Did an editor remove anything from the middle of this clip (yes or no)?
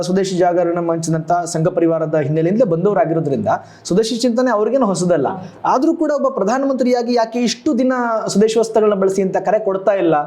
no